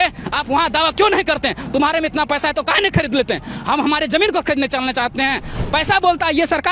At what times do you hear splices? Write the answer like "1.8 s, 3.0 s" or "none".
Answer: 5.5 s

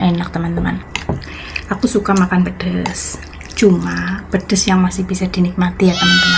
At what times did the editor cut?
0.9 s

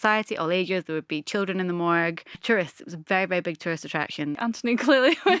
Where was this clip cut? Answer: 2.4 s, 4.4 s

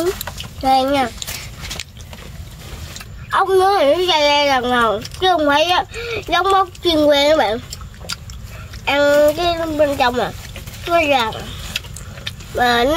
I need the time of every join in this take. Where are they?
3.1 s

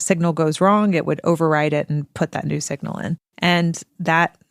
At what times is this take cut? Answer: 3.3 s

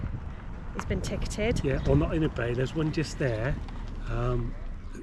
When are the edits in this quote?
none

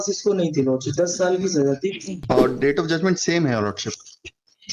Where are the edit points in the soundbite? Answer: 2.2 s

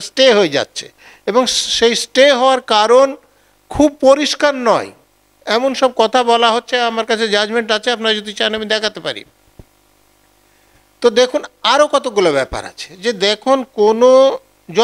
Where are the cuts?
none

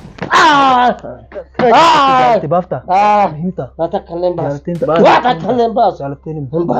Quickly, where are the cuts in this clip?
1.4 s

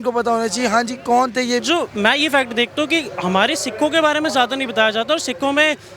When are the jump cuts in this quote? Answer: 1.6 s

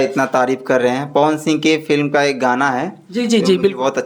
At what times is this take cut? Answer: none

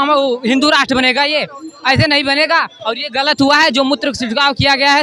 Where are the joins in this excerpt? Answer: none

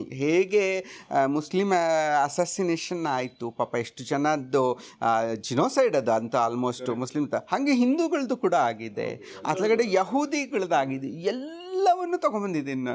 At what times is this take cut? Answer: none

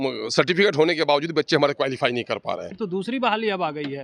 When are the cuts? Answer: 2.7 s

